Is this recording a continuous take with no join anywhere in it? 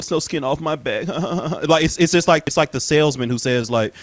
no; 1 cut; at 2.4 s

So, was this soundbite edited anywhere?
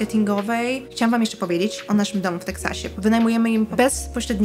yes; 4 cuts; at 0.9 s, 1.8 s, 2.8 s, 3.7 s

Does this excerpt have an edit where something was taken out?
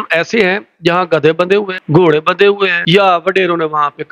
yes; 2 cuts; at 1.8 s, 2.8 s

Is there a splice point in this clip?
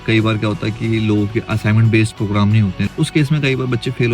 yes; 1 cut; at 2.9 s

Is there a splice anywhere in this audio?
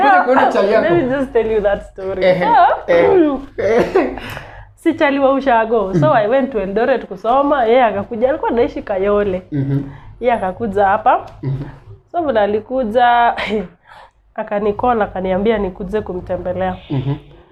no; 0 cuts

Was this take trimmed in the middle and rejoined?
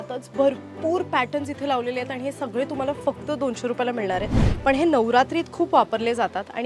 yes; 1 cut; at 4.5 s

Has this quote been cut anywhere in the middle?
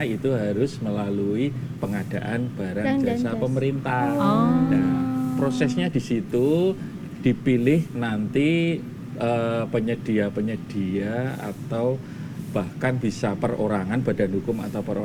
no; 0 cuts

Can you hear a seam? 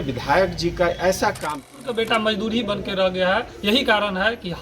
yes; 1 cut; at 1.7 s

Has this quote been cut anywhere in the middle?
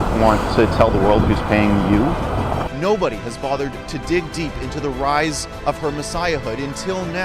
yes; 1 cut; at 2.7 s

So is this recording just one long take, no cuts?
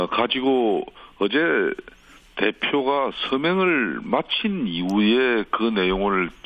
no; 1 cut; at 4.0 s

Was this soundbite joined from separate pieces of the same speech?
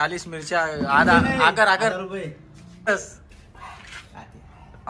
yes; 1 cut; at 2.9 s

